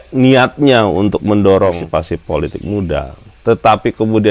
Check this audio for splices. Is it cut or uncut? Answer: cut